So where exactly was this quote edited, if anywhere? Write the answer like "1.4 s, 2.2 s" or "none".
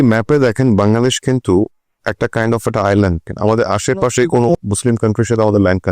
3.3 s, 4.6 s